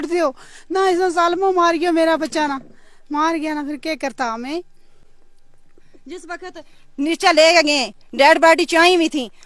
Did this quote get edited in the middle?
no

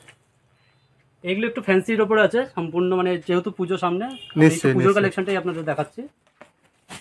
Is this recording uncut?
yes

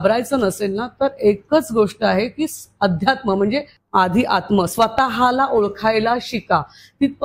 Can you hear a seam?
yes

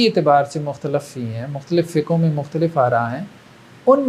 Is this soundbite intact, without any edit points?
yes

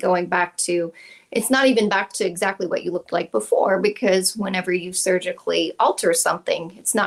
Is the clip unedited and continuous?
yes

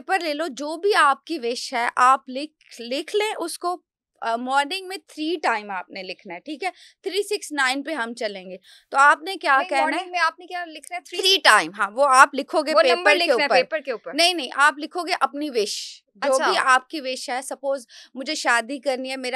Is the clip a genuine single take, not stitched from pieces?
yes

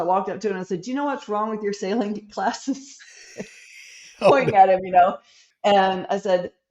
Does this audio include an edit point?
yes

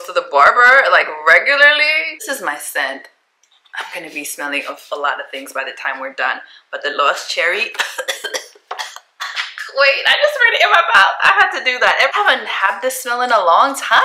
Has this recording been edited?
yes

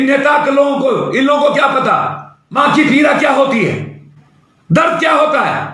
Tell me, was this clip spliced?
yes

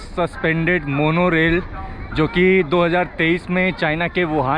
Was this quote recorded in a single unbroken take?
yes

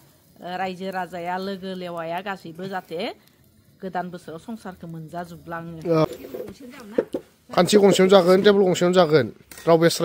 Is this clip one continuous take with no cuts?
no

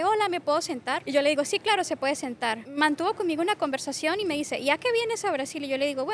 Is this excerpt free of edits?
no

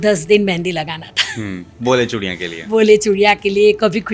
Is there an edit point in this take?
no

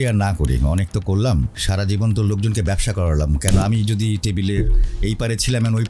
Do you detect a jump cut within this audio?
yes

